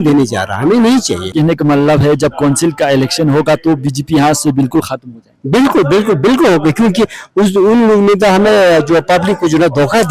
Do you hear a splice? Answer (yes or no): yes